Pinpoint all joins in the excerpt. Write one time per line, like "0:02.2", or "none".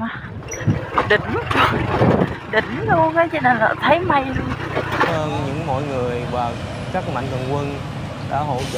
0:05.1